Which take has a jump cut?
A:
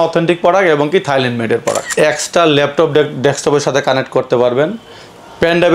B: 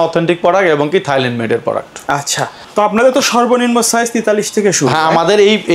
A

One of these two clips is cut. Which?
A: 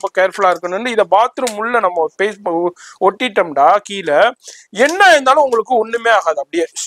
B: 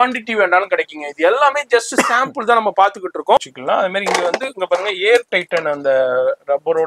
B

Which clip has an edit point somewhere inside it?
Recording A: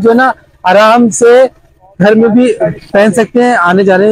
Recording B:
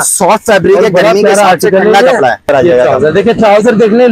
B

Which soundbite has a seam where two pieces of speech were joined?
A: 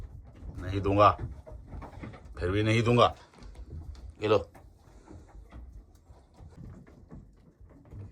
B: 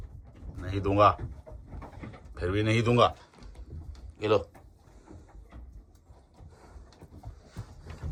A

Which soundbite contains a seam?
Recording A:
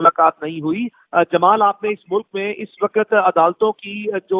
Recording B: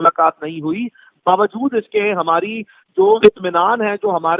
A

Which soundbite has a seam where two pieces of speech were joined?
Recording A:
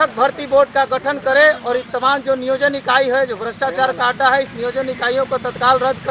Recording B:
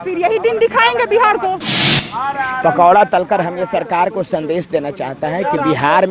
B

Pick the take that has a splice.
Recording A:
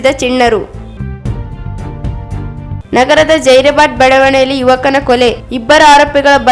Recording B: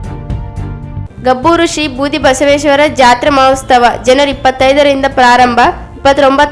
A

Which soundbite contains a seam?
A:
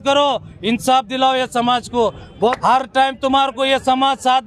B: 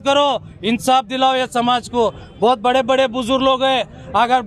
A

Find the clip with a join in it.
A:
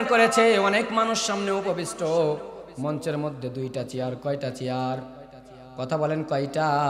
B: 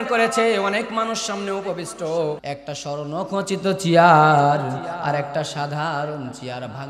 B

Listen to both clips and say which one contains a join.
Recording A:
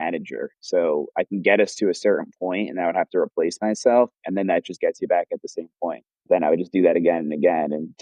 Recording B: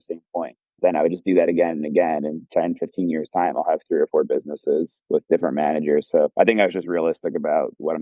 B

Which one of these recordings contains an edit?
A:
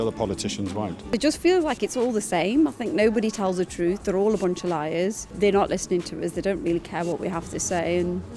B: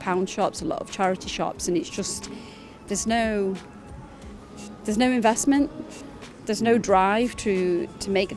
A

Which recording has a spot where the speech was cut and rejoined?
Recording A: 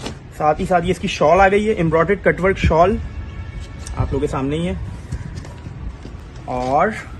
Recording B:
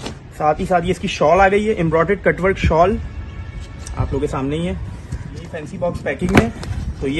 B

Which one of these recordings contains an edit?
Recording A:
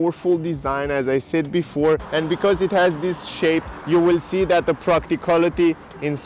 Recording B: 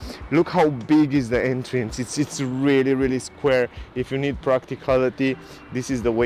A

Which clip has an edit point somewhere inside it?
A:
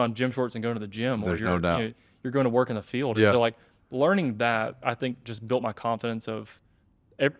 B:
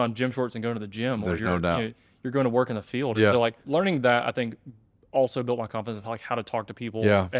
B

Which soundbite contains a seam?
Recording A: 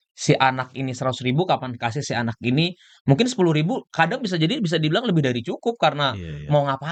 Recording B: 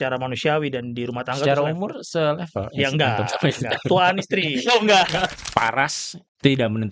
B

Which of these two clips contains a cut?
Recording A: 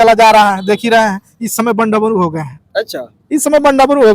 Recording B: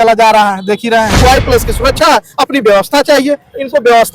B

